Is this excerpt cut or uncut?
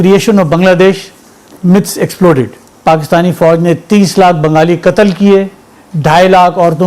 cut